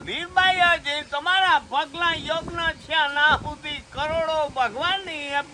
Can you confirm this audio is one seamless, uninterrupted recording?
yes; 0 cuts

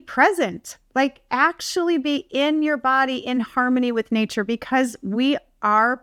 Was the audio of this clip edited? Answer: no; 0 cuts

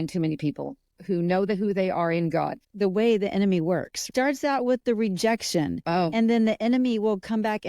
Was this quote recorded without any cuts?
no; 3 cuts; at 0.9 s, 2.6 s, 4.1 s

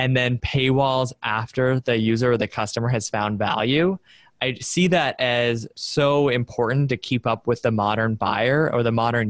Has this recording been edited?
no; 0 cuts

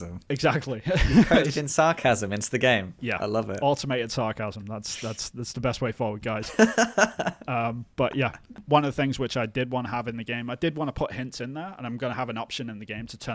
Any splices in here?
yes; 1 cut; at 8.6 s

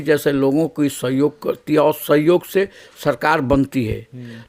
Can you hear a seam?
no; 0 cuts

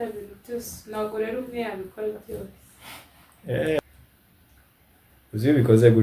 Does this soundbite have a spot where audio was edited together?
yes; 1 cut; at 3.8 s

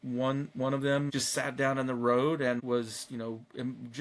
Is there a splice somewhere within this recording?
yes; 2 cuts; at 1.1 s, 2.6 s

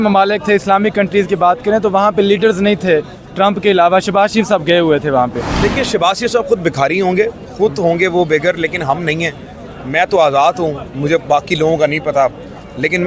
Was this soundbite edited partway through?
no; 0 cuts

